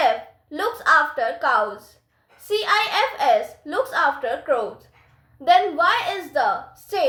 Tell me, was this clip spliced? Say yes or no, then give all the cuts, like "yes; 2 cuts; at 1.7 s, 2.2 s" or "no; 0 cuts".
no; 0 cuts